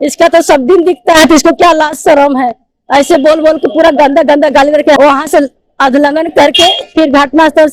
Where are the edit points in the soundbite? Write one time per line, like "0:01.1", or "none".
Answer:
0:05.0